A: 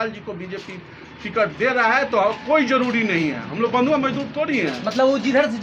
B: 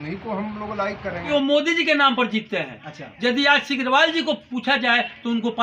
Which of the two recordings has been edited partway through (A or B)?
B